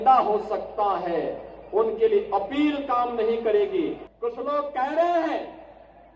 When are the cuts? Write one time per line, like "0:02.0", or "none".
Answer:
0:04.1